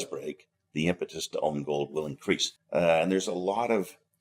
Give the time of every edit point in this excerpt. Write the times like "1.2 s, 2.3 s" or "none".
2.5 s